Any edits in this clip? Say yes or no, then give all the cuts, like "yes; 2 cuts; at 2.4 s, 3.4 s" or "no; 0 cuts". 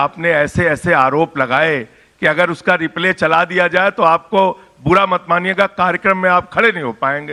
no; 0 cuts